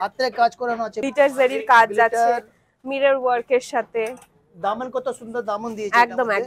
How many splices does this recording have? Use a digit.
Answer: 1